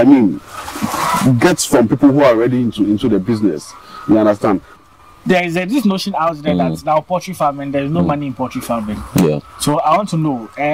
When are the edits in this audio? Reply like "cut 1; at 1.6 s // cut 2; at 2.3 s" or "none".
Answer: cut 1; at 4.7 s

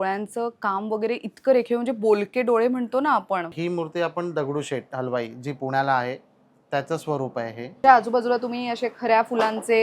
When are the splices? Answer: cut 1; at 3.5 s // cut 2; at 7.8 s

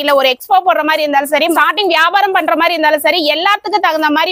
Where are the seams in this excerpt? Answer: none

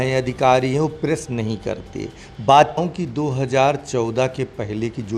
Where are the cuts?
cut 1; at 2.8 s

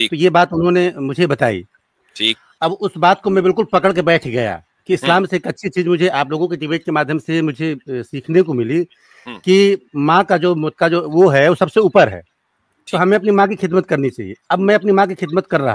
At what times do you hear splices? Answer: cut 1; at 2.5 s // cut 2; at 10.7 s

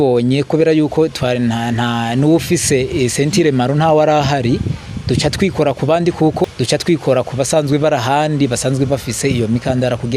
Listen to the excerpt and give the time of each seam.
cut 1; at 6.4 s

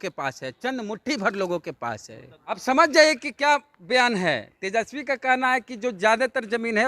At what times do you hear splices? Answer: cut 1; at 2.6 s

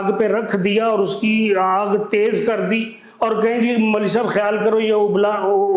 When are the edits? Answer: none

